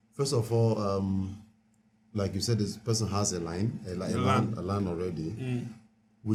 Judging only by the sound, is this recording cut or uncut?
uncut